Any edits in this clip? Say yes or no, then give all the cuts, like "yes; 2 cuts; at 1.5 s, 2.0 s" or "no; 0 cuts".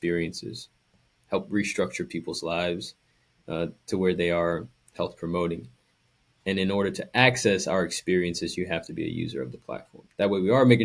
no; 0 cuts